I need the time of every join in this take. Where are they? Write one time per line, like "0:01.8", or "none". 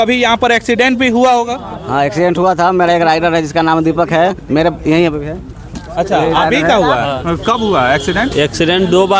0:07.2